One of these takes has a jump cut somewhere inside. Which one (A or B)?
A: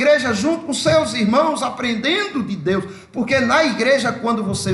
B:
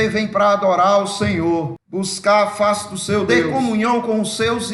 B